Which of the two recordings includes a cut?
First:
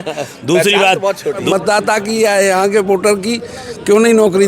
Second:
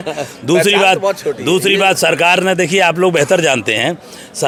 first; 1 cut; at 1.4 s

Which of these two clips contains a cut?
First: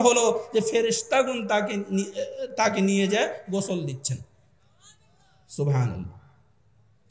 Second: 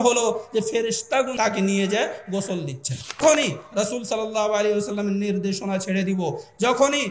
second; 2 cuts; at 1.3 s, 3.2 s

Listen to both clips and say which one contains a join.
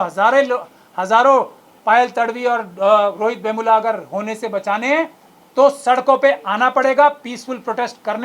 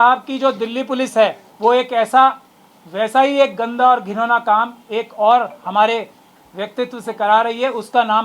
second; 1 cut; at 1.5 s

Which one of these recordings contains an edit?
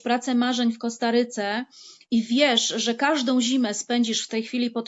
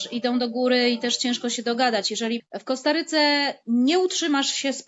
second; 1 cut; at 2.5 s

